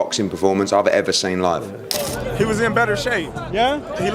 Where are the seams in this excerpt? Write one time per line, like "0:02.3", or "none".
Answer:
0:01.9

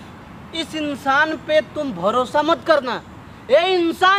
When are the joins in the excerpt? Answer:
none

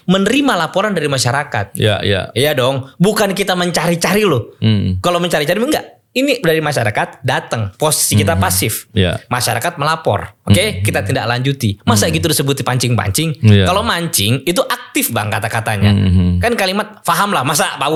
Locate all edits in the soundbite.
none

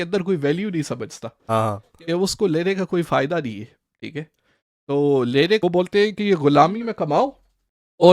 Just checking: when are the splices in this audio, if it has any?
0:05.6

